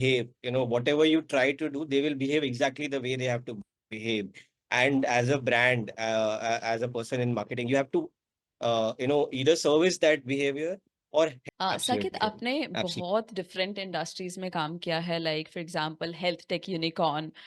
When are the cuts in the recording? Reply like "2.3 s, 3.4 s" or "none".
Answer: 11.4 s